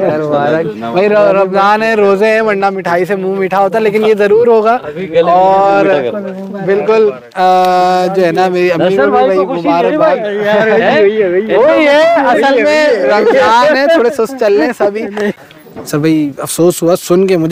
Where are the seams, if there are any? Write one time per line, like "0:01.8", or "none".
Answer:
0:15.3